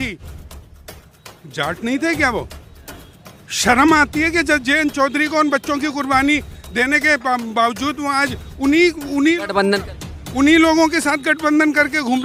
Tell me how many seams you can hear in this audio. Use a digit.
0